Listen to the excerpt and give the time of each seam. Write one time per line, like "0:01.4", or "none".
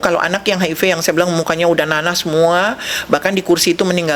none